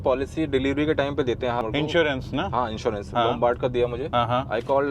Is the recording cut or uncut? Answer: cut